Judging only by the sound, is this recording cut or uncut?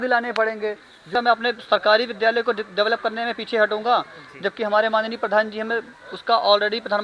cut